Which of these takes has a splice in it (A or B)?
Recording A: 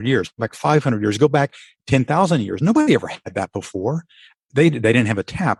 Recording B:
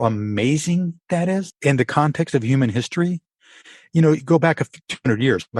B